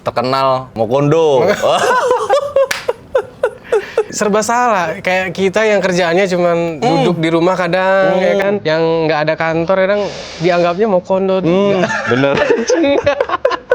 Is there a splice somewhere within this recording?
yes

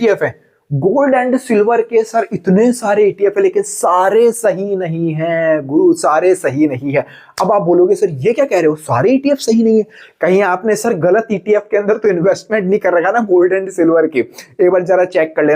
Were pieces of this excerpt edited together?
no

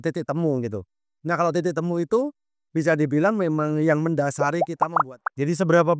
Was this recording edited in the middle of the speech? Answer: yes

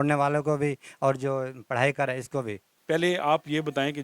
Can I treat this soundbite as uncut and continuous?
no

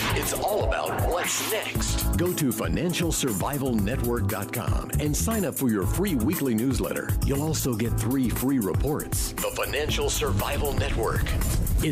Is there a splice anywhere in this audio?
no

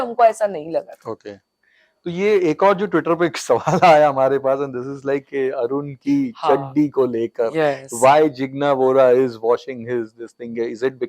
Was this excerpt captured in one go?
yes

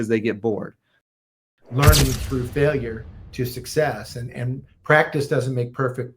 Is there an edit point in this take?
yes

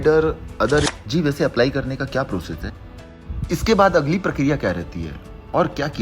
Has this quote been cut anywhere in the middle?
yes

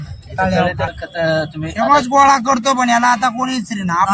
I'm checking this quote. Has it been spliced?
yes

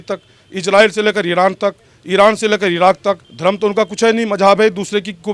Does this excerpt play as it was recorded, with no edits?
no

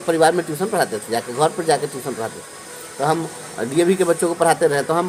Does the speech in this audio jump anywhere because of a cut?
no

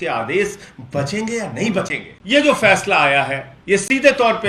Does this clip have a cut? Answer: yes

